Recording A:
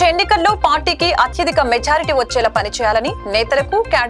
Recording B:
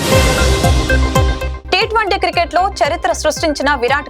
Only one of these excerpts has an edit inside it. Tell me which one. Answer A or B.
B